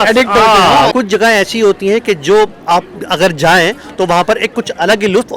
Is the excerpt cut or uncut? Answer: cut